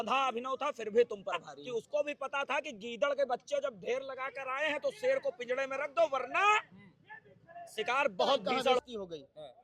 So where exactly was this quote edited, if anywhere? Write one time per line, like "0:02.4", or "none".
0:01.5
0:08.8